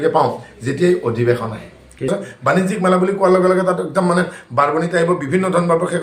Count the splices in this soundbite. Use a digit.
1